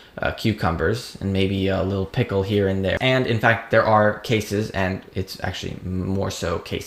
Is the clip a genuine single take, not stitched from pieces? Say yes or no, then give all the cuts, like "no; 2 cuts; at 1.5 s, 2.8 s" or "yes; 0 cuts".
no; 1 cut; at 2.9 s